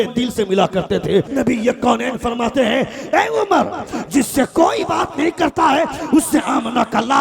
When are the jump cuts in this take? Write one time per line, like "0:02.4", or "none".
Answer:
0:01.3